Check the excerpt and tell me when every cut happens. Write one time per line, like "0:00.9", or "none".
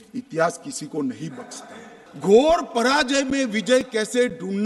0:02.2